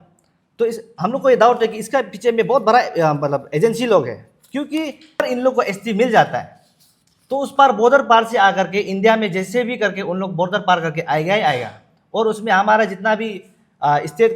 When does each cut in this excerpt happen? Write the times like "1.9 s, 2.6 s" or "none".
5.2 s